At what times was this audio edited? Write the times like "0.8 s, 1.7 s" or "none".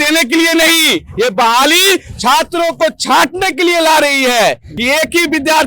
4.7 s